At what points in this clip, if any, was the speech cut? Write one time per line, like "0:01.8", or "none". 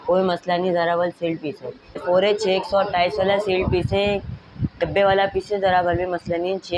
0:02.0